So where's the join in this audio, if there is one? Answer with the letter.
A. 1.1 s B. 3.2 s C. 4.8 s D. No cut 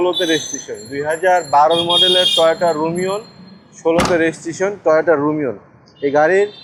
D